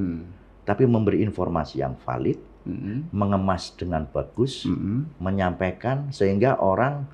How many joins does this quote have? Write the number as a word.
zero